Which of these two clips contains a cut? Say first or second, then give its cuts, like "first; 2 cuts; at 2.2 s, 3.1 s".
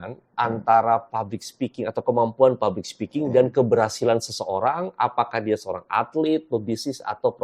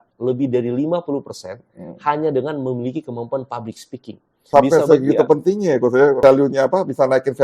second; 2 cuts; at 4.5 s, 6.2 s